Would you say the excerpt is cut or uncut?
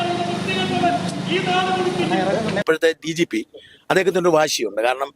cut